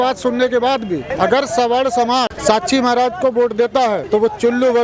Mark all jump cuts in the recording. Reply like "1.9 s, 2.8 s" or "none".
1.1 s, 2.3 s, 4.0 s